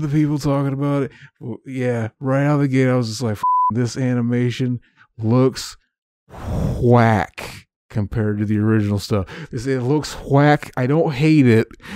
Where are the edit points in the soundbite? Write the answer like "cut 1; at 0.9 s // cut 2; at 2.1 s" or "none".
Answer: none